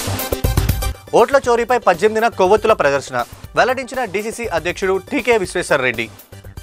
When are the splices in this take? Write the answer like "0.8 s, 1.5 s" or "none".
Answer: none